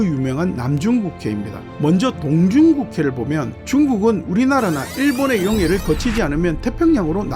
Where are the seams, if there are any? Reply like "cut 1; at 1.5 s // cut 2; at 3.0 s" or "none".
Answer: cut 1; at 1.7 s